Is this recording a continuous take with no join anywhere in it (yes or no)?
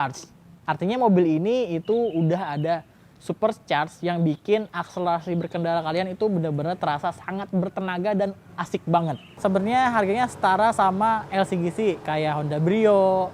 no